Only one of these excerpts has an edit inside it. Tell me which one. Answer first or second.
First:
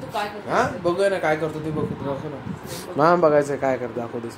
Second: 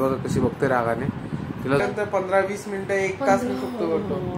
second